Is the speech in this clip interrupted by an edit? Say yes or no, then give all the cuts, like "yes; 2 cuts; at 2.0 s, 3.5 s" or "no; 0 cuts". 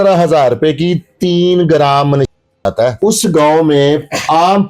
yes; 1 cut; at 3.0 s